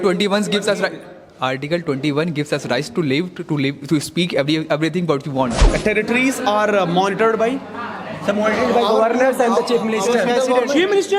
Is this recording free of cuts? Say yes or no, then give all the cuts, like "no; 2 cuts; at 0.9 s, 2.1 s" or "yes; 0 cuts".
no; 1 cut; at 5.7 s